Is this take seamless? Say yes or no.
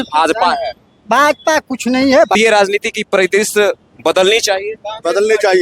no